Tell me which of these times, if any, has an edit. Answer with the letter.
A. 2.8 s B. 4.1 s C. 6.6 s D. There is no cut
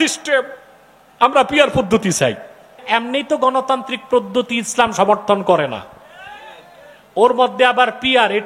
A